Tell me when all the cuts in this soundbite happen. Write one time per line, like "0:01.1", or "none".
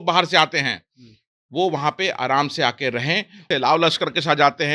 0:03.5